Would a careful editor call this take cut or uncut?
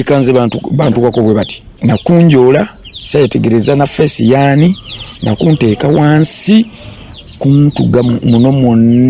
cut